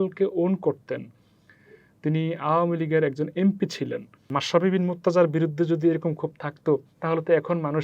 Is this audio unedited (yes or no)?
no